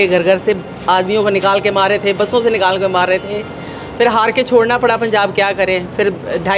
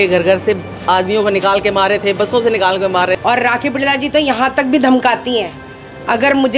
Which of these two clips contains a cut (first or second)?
second